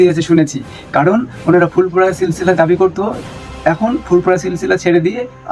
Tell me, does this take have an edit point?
no; 0 cuts

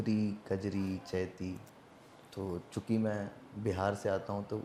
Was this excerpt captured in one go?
yes; 0 cuts

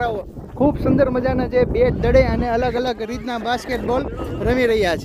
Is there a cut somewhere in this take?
no; 0 cuts

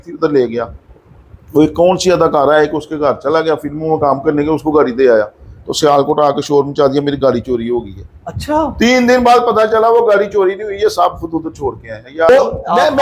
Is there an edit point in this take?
no; 0 cuts

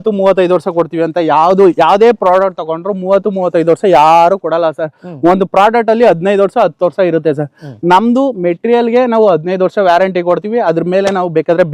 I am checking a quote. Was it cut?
no; 0 cuts

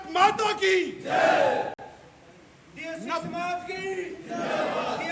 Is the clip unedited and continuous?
yes; 0 cuts

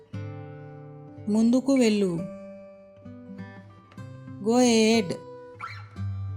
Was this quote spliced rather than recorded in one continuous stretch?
yes; 4 cuts; at 1.2 s, 2.5 s, 4.2 s, 5.4 s

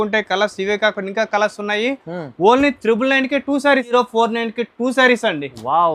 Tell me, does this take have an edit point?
yes; 1 cut; at 3.9 s

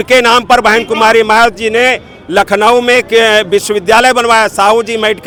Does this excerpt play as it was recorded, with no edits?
yes; 0 cuts

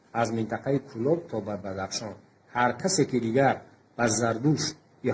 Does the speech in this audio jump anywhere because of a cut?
no; 0 cuts

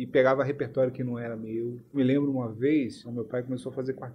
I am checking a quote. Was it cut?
yes; 2 cuts; at 2.0 s, 3.0 s

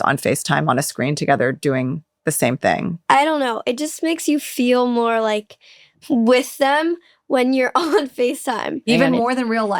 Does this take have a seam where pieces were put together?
no; 0 cuts

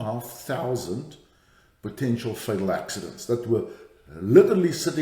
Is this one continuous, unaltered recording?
yes; 0 cuts

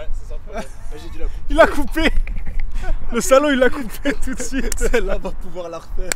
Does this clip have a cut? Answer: no; 0 cuts

